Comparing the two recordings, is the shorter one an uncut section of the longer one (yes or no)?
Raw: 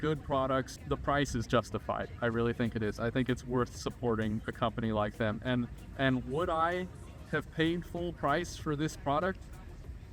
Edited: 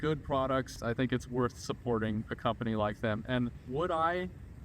no